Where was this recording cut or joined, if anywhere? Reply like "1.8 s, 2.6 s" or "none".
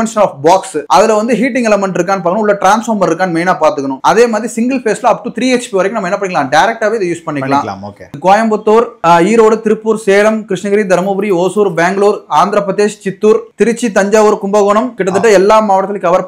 4.0 s, 8.1 s, 13.5 s, 14.9 s